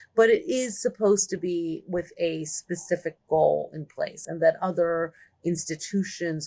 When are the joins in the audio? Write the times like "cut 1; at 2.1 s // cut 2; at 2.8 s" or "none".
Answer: none